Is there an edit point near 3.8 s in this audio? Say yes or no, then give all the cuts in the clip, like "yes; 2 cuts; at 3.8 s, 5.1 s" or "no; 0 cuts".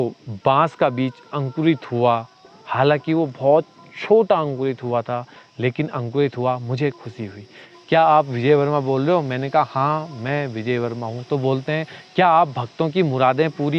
no; 1 cut; at 7.7 s